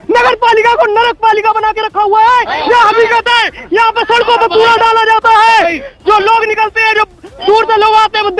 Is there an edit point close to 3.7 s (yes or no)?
no